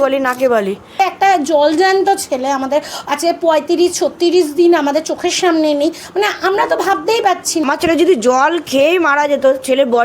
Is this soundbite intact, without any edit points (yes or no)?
no